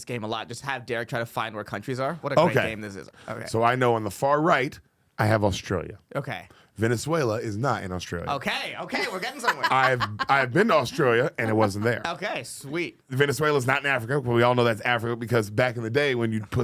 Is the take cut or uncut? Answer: cut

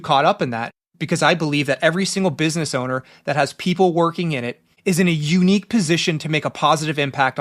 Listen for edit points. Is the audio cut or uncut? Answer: uncut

